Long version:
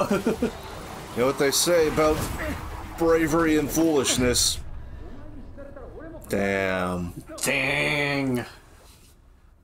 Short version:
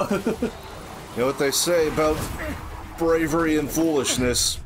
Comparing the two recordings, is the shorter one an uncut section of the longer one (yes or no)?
yes